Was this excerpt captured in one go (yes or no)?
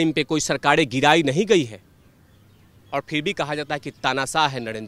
yes